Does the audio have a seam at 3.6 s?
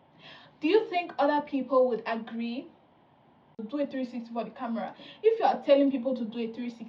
yes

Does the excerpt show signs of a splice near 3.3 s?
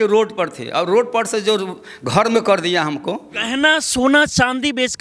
yes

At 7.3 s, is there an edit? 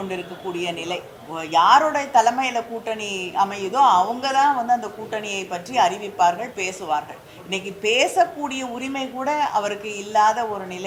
no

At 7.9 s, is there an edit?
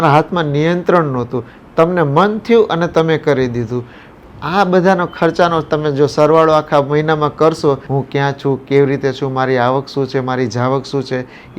yes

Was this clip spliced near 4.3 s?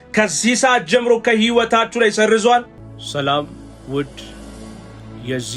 no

